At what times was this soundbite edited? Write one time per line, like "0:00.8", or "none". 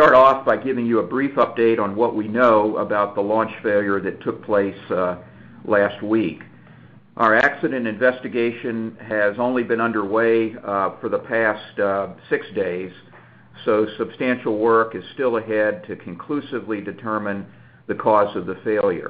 0:11.7